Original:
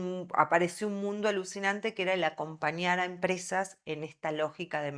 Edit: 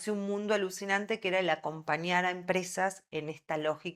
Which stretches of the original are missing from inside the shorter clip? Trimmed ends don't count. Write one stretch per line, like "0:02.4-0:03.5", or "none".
none